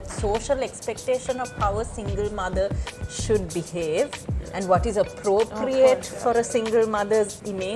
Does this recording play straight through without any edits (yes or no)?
yes